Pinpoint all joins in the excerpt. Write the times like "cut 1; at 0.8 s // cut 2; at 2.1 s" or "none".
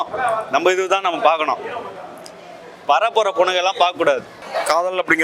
cut 1; at 4.4 s